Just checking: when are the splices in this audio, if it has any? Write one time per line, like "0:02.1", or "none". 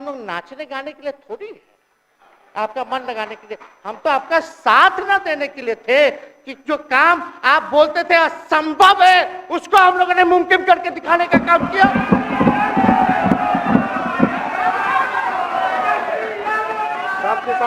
none